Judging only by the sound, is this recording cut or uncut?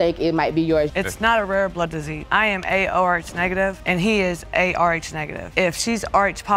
cut